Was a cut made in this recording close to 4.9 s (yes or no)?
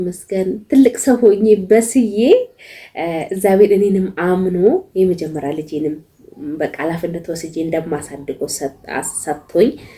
no